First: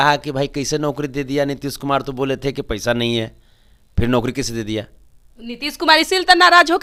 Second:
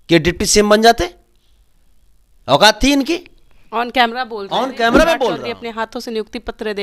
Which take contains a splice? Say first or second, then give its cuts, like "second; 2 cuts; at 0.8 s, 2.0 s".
second; 1 cut; at 5.4 s